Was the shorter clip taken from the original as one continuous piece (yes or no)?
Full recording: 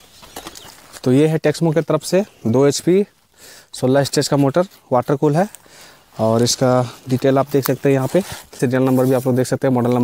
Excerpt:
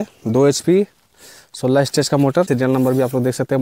no